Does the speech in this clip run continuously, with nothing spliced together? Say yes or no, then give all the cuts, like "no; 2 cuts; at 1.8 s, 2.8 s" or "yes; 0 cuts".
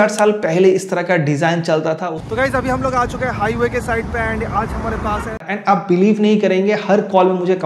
no; 2 cuts; at 2.1 s, 5.4 s